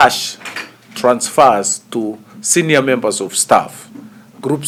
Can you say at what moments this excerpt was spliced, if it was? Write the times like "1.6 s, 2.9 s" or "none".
none